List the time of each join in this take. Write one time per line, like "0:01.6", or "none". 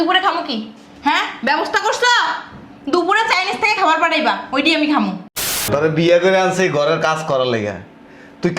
0:05.6